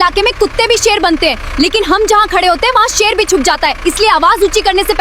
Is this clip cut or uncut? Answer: uncut